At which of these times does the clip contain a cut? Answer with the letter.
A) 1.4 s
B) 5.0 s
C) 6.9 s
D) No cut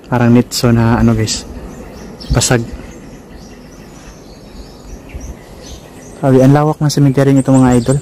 D